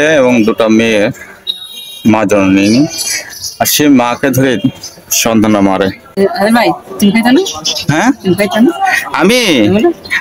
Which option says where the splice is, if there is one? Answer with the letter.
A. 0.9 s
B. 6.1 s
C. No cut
B